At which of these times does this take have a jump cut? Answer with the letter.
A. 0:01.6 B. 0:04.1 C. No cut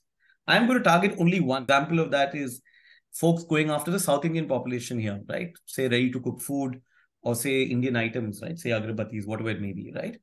A